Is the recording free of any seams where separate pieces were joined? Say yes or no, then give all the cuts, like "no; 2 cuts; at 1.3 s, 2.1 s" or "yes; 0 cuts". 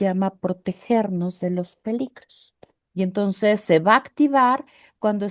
no; 1 cut; at 2.7 s